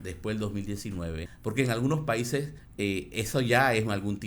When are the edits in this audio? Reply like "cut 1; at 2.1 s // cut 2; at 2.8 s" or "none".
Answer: cut 1; at 1.3 s // cut 2; at 2.6 s

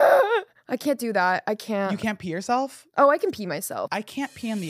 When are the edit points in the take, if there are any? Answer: cut 1; at 3.8 s

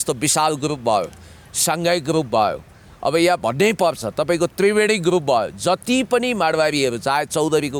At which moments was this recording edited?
none

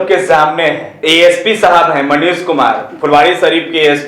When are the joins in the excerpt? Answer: cut 1; at 0.9 s

